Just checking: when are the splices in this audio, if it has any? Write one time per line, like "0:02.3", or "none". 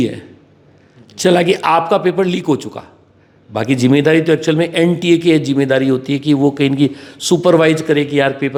none